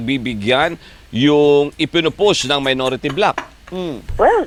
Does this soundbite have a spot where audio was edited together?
no; 0 cuts

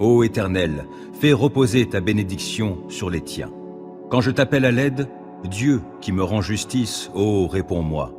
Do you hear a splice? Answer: yes; 1 cut; at 3.9 s

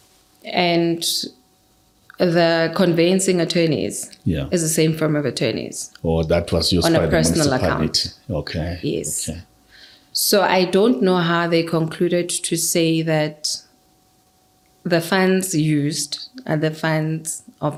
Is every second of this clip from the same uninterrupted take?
yes; 0 cuts

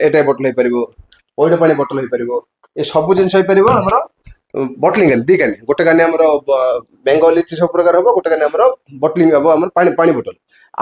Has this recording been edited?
no; 0 cuts

